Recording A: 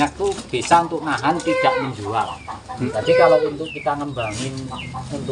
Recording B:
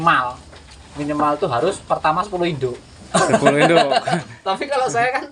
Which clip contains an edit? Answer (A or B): A